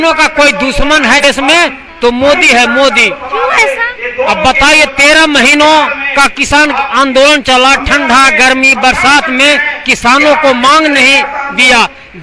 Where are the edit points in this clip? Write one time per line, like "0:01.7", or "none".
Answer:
0:01.2